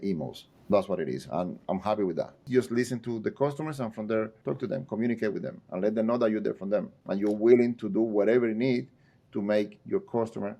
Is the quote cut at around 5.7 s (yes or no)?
no